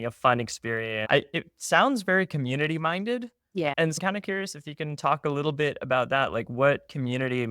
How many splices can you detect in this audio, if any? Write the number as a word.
two